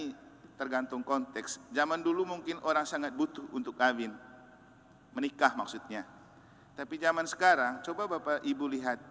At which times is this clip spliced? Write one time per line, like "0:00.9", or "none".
none